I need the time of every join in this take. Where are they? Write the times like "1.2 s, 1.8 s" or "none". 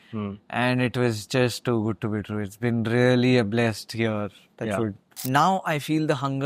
5.1 s